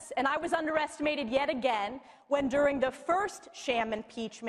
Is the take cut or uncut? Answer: cut